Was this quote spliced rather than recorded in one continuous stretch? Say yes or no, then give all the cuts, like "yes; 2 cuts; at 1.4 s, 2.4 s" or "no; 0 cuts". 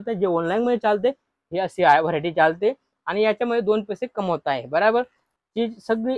yes; 1 cut; at 5.2 s